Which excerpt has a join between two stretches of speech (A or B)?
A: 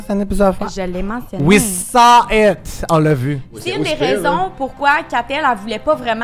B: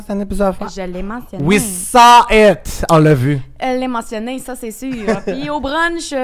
A